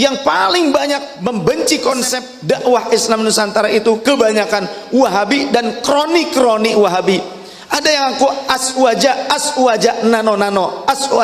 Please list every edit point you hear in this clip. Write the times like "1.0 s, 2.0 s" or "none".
1.1 s, 2.3 s